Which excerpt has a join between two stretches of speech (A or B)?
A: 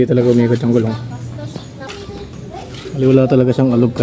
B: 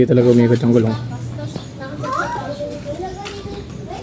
A